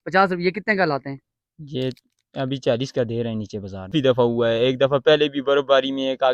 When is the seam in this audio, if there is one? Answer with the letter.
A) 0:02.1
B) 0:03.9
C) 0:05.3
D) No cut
B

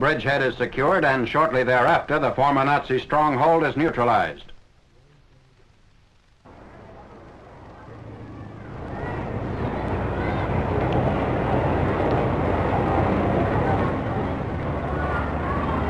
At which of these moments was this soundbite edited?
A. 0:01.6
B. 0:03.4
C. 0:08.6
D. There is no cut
D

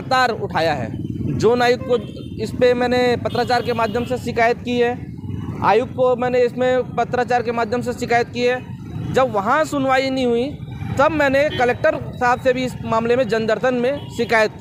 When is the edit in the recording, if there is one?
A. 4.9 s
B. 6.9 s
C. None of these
C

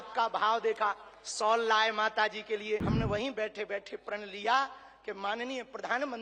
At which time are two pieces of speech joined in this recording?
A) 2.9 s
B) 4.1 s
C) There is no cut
A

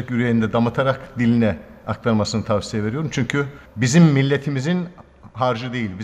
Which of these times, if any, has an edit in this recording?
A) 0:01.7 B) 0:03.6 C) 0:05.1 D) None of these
D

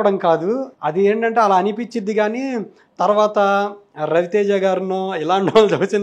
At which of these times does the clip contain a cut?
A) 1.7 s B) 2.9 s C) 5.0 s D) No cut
D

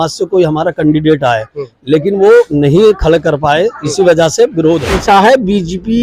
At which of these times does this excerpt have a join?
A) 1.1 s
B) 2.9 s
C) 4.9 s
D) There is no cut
C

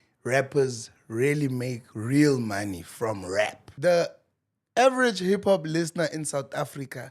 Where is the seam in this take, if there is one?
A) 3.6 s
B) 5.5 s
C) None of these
A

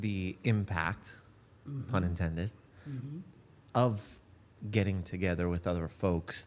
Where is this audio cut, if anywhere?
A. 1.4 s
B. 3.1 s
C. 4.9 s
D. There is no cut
D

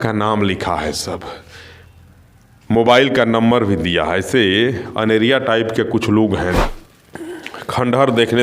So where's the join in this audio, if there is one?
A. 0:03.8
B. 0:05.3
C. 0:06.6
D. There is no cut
C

